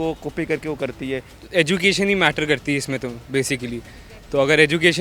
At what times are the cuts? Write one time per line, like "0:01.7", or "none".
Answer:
0:01.3